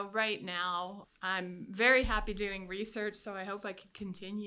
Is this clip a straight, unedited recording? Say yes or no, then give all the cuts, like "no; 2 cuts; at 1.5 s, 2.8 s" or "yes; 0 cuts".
no; 1 cut; at 1.0 s